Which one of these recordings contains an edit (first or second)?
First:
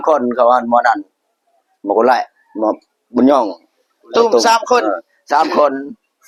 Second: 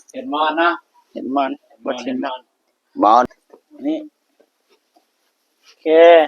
second